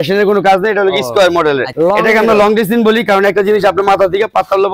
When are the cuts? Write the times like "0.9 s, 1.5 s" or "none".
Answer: 1.7 s

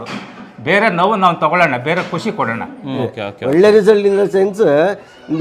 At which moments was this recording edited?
3.0 s

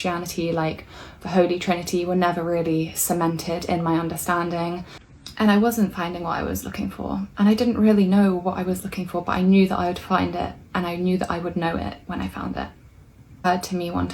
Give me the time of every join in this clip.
5.0 s

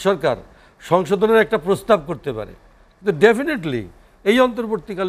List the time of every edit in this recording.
none

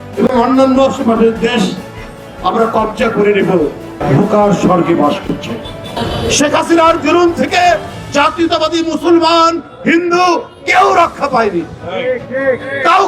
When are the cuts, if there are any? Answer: 4.0 s, 5.9 s

